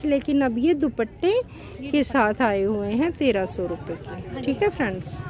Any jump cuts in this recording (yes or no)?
no